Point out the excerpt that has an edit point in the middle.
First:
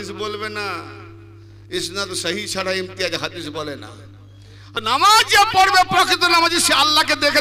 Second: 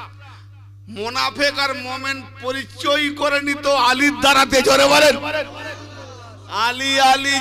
first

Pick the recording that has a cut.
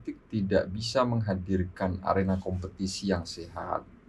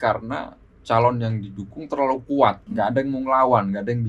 second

